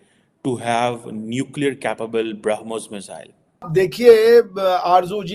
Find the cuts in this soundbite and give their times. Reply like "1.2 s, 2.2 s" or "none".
3.5 s

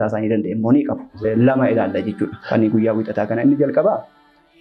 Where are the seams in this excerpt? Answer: 1.2 s

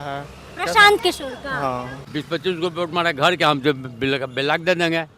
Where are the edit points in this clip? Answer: 2.0 s

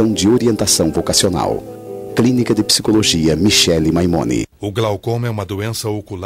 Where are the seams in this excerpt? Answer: 4.5 s

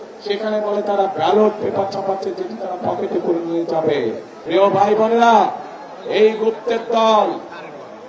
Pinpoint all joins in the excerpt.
4.3 s

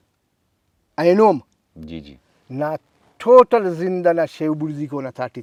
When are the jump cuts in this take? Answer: none

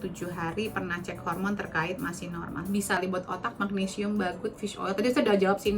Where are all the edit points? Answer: 3.0 s

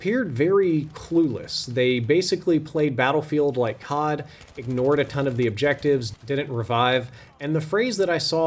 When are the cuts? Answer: 6.1 s

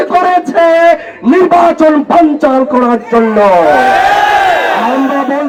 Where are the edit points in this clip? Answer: none

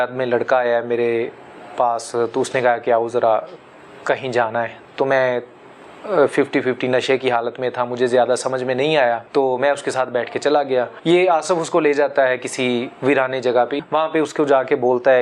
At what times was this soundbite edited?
9.2 s, 10.9 s, 13.8 s

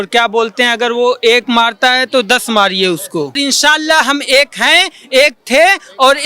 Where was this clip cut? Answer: 3.4 s

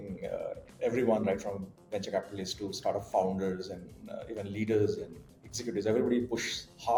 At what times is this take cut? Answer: none

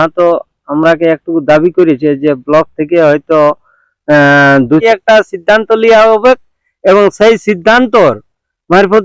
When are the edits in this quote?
4.8 s

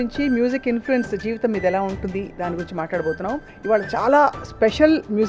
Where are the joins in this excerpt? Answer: 3.5 s

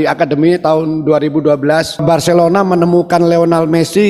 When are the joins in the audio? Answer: 2.0 s

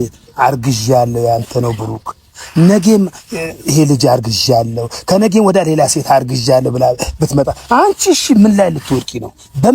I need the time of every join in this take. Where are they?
none

